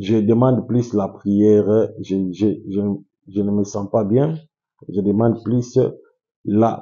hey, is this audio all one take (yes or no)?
yes